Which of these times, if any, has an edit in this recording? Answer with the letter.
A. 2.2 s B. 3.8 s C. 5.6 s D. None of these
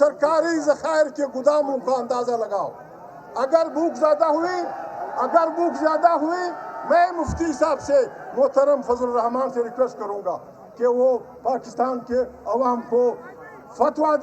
A